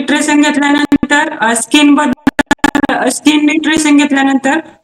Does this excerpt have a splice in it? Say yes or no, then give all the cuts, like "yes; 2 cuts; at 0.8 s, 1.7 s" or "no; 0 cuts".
no; 0 cuts